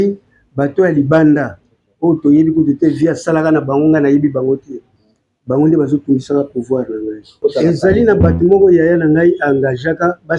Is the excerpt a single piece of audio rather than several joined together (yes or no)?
no